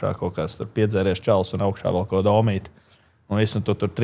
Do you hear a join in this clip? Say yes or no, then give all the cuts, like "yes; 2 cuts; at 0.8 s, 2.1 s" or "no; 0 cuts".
no; 0 cuts